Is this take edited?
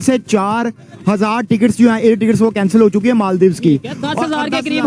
no; 0 cuts

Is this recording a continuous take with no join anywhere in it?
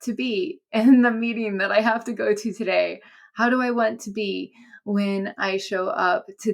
yes; 0 cuts

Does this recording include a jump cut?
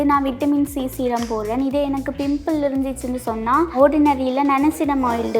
yes; 1 cut; at 3.7 s

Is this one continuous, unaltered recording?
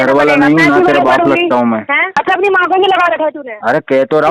no; 1 cut; at 2.2 s

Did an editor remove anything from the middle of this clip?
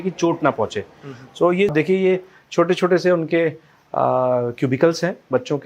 yes; 1 cut; at 1.7 s

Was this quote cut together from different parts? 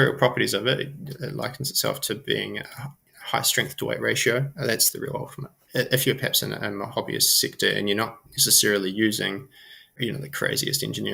no; 0 cuts

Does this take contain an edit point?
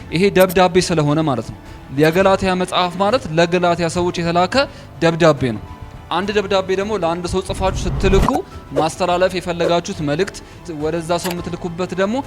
yes; 1 cut; at 10.6 s

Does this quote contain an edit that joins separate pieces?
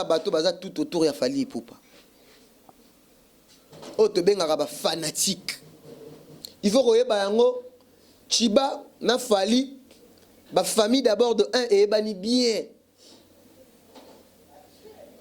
yes; 1 cut; at 6.4 s

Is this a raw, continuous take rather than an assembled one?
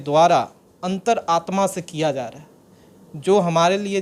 yes; 0 cuts

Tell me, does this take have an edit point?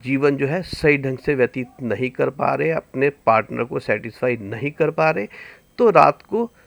no; 0 cuts

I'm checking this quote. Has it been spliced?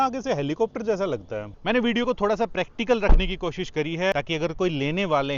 yes; 2 cuts; at 1.5 s, 4.1 s

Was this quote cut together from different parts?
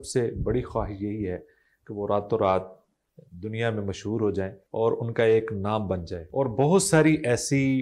yes; 2 cuts; at 4.6 s, 6.2 s

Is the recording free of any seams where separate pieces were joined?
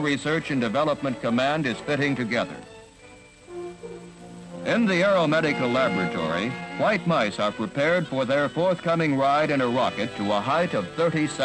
no; 1 cut; at 3.0 s

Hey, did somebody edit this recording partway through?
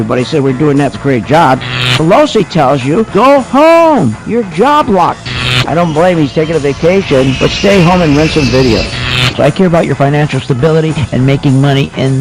no; 0 cuts

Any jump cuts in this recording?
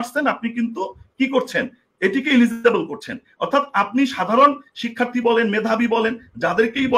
no; 0 cuts

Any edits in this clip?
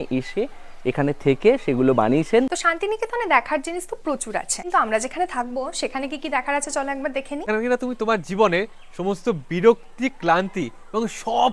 yes; 3 cuts; at 2.5 s, 4.6 s, 7.4 s

